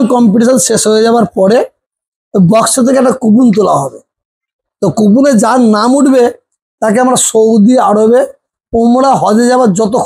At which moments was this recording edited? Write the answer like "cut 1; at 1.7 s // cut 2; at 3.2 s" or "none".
none